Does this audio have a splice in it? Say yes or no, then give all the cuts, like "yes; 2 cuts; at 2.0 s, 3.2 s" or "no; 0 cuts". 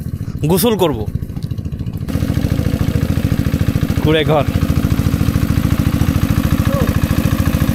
no; 0 cuts